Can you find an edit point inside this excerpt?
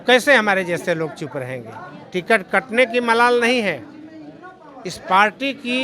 no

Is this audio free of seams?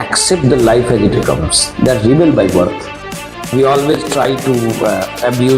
no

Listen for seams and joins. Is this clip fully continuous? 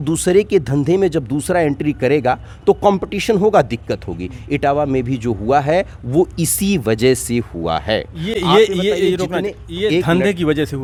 yes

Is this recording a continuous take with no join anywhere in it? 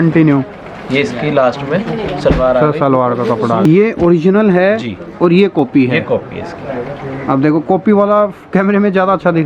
no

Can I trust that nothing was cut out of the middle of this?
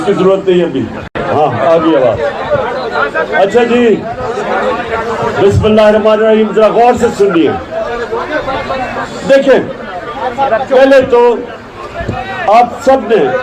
no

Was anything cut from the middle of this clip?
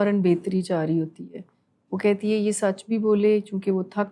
no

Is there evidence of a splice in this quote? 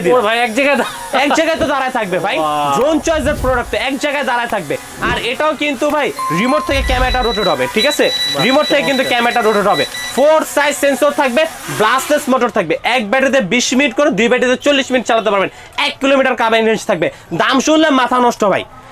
no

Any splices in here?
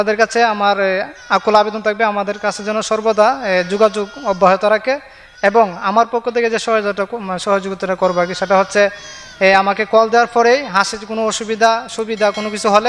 no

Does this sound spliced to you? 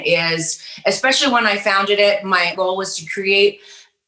yes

